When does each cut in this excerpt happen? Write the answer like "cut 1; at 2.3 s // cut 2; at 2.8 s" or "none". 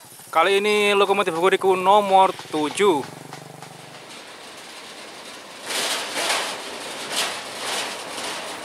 cut 1; at 3.9 s

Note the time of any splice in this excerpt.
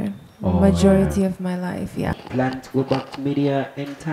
cut 1; at 2.1 s

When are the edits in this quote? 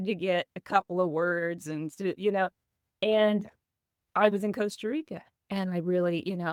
none

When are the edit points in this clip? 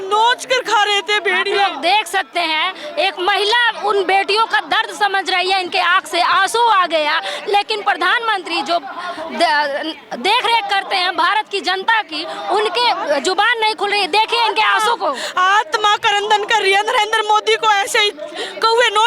none

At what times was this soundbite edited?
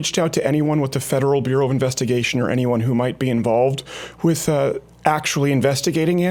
none

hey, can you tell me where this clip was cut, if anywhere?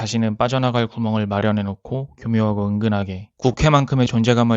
cut 1; at 3.3 s

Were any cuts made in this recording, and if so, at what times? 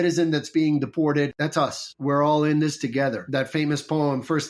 cut 1; at 1.0 s // cut 2; at 3.2 s

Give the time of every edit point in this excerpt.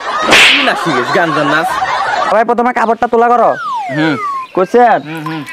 cut 1; at 2.3 s

